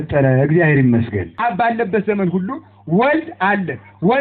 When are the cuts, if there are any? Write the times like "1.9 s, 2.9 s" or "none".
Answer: 1.3 s